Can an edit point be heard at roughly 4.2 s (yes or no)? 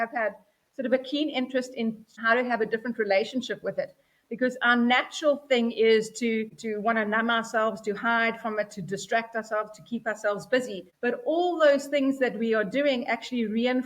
no